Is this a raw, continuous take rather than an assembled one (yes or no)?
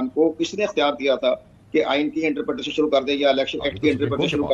yes